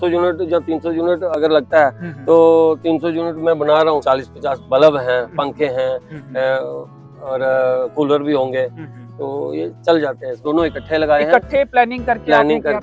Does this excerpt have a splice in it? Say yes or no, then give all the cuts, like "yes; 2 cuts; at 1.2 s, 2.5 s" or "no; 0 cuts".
yes; 2 cuts; at 4.0 s, 10.3 s